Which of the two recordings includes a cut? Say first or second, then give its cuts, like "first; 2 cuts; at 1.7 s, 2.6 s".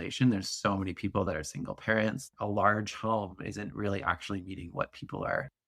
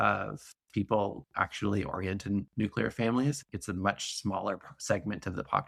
first; 2 cuts; at 1.3 s, 2.2 s